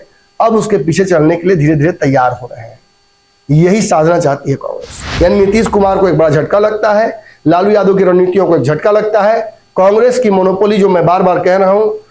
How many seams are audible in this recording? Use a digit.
1